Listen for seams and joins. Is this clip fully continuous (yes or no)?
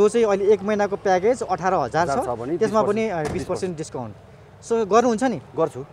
yes